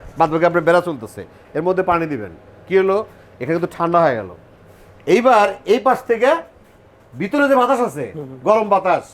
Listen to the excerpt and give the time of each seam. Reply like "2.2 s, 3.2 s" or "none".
none